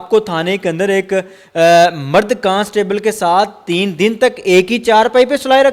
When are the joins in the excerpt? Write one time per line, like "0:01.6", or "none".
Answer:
none